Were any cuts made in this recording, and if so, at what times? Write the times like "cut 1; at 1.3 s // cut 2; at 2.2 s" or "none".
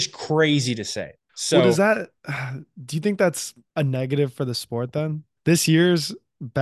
none